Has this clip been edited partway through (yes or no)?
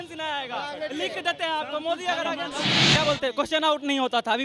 yes